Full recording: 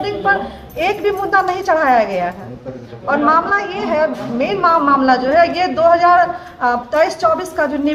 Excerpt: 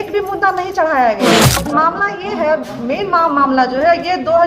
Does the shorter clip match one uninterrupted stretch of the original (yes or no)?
no